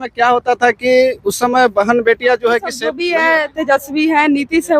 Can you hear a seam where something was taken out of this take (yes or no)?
yes